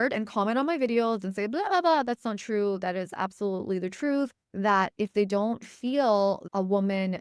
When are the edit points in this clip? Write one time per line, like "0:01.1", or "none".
0:04.4
0:06.4